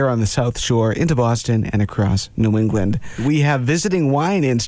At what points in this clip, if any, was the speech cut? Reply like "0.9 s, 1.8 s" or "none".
3.2 s